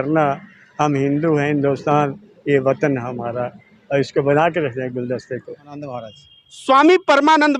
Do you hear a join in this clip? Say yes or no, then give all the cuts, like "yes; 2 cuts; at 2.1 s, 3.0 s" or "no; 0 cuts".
yes; 1 cut; at 5.6 s